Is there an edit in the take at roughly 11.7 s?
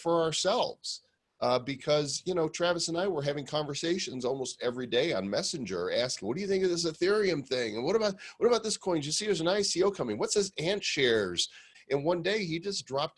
yes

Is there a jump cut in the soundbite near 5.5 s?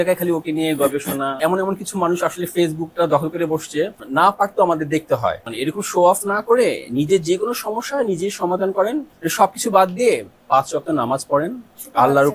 yes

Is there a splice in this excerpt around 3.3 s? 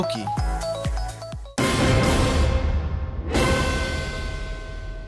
no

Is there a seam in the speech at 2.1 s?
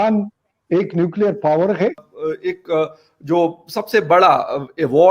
yes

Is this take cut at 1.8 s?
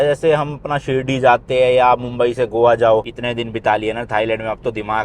no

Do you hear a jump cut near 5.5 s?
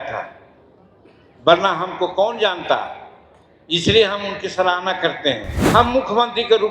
yes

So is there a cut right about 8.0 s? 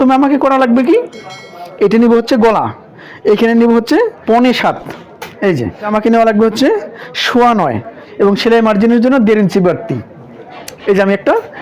yes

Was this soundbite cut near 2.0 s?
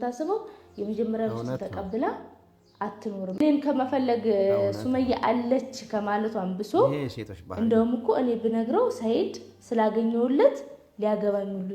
no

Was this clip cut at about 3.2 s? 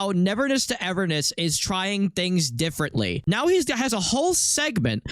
yes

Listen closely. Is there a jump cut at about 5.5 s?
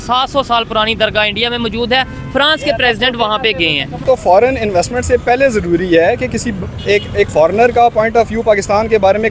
no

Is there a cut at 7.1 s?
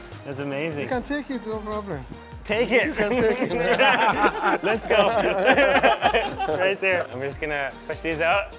yes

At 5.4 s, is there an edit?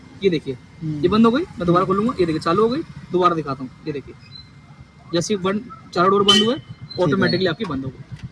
no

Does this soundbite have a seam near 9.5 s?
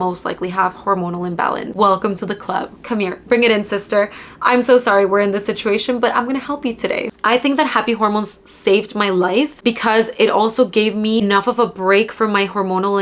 yes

